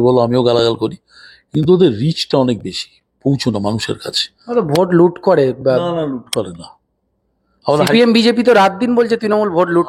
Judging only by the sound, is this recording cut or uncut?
uncut